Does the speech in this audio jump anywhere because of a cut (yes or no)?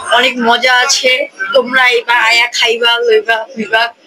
no